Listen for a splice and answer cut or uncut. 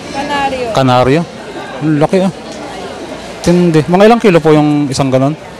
uncut